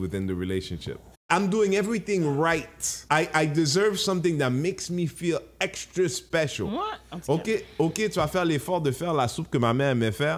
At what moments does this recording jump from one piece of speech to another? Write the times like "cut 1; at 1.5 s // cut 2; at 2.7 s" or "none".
cut 1; at 1.2 s // cut 2; at 3.0 s // cut 3; at 6.7 s